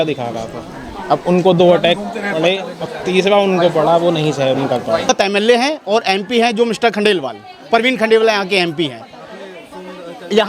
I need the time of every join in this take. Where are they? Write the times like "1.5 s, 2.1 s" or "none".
5.1 s